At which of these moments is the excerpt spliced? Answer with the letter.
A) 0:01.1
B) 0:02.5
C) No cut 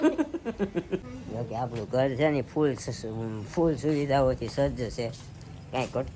A